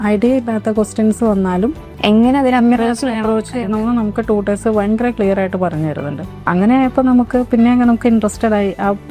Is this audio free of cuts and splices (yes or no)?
no